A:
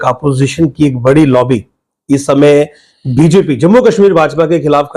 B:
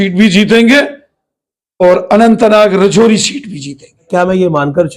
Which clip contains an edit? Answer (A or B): B